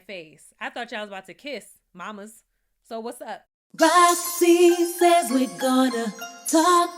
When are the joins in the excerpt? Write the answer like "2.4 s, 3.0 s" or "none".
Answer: 3.7 s